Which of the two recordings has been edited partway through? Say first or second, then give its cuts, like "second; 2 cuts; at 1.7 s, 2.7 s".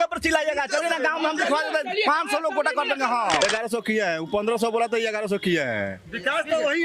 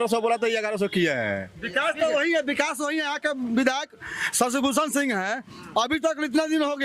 first; 1 cut; at 3.4 s